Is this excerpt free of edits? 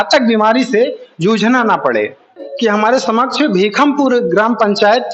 no; 1 cut; at 2.5 s

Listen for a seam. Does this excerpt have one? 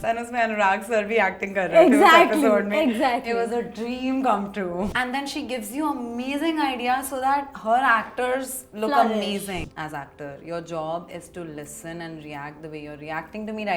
yes; 2 cuts; at 4.9 s, 9.6 s

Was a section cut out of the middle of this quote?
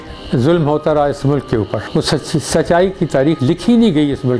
yes; 1 cut; at 1.9 s

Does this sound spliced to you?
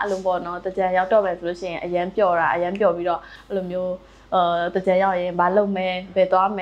no; 0 cuts

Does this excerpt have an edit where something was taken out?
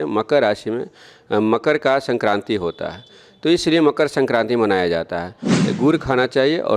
yes; 1 cut; at 5.6 s

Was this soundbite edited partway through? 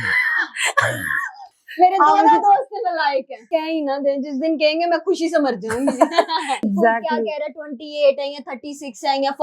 yes; 2 cuts; at 3.5 s, 6.7 s

